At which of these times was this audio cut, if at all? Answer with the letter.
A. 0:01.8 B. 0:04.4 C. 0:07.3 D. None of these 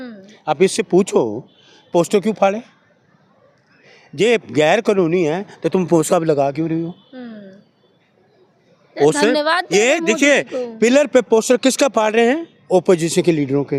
D